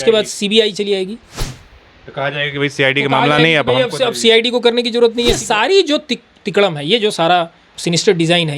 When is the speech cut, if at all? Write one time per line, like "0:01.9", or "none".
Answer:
0:05.4
0:07.7